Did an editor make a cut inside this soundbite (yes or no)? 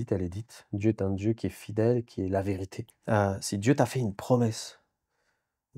yes